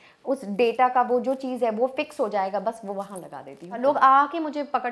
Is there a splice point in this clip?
yes; 1 cut; at 3.8 s

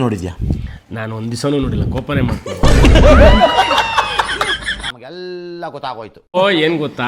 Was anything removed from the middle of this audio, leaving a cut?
no; 0 cuts

